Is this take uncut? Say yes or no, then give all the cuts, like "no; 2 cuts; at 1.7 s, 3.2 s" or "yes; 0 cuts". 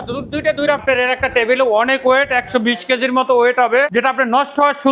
no; 2 cuts; at 0.8 s, 3.9 s